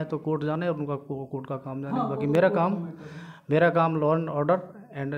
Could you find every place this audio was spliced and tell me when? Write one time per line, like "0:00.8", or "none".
none